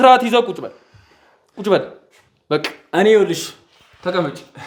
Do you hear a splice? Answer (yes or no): no